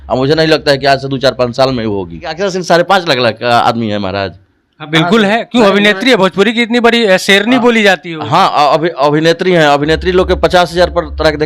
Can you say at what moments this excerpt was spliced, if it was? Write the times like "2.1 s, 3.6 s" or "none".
2.4 s